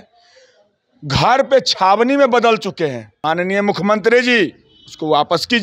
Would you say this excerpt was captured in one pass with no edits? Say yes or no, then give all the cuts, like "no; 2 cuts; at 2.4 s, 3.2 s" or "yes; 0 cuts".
no; 1 cut; at 3.1 s